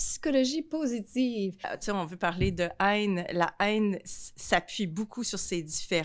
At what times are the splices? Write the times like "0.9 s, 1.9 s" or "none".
1.8 s